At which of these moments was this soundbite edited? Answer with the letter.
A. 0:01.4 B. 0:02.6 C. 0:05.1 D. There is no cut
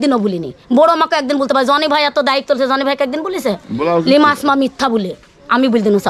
D